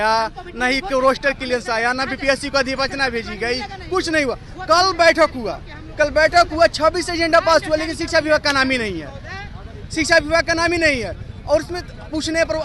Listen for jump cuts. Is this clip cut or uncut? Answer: uncut